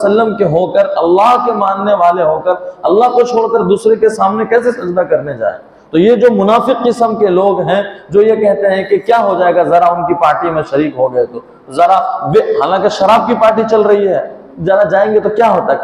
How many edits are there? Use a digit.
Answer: 1